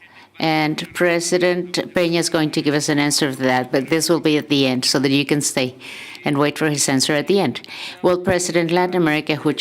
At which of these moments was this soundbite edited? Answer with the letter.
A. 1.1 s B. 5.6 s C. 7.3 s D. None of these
C